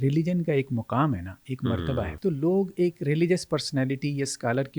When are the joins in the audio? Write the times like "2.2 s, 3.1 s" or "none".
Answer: 2.1 s